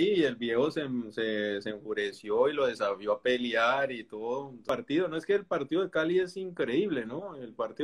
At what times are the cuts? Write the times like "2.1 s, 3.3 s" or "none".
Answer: 4.6 s